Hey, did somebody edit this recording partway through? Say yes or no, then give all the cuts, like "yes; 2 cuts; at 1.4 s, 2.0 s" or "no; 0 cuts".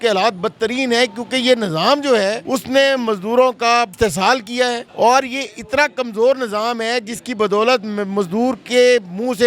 yes; 3 cuts; at 2.4 s, 3.9 s, 4.9 s